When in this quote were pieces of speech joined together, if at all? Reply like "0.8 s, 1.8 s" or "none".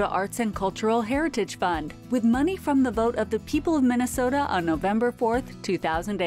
none

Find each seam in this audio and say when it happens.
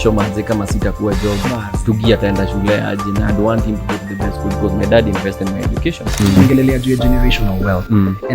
6.2 s

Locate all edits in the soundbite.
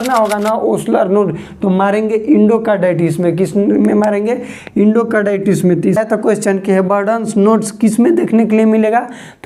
6.0 s

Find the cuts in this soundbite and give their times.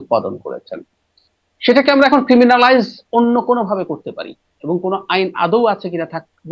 none

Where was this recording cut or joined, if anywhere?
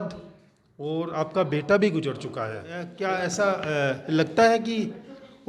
2.9 s

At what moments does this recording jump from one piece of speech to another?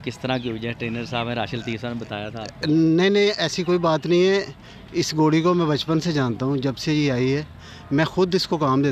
none

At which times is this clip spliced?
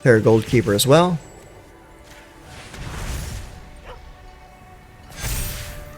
4.5 s

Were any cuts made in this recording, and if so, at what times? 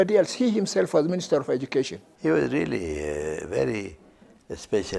2.0 s

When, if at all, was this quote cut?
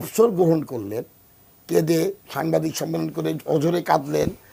none

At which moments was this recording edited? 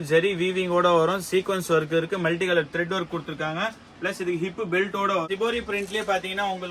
5.3 s

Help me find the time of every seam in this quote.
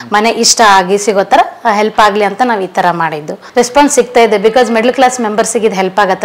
3.3 s

